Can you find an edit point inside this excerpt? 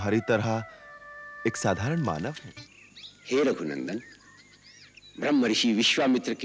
yes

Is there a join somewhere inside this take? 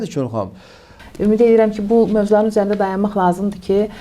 yes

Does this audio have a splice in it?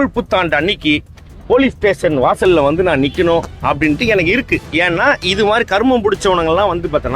yes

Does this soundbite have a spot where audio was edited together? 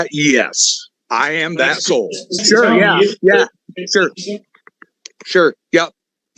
yes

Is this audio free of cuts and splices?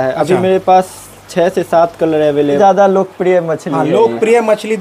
no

